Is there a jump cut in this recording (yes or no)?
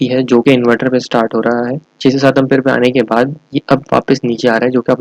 yes